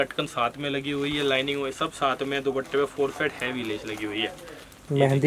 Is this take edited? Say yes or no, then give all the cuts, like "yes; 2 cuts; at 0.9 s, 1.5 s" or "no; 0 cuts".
no; 0 cuts